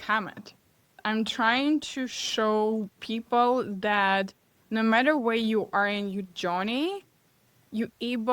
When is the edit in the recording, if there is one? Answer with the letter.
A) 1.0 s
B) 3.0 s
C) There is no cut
A